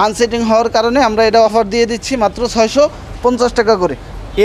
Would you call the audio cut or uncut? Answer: uncut